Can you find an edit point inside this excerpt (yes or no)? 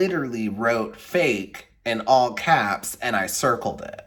no